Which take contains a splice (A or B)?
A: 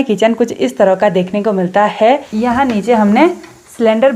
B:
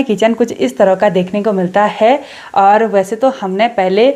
A